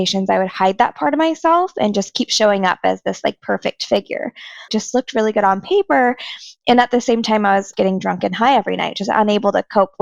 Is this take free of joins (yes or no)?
no